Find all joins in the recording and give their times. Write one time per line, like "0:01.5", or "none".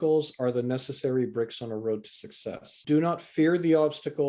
0:02.7